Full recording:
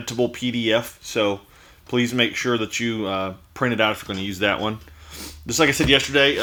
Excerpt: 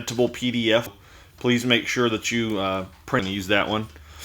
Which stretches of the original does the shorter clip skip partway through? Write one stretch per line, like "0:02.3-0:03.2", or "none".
0:01.0-0:01.5
0:03.7-0:04.1